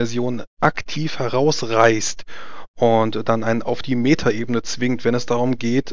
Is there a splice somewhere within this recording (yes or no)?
no